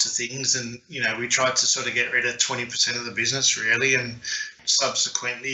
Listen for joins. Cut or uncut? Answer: cut